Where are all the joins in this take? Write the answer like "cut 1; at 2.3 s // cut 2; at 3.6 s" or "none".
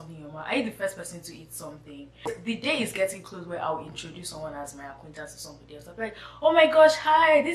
cut 1; at 2.4 s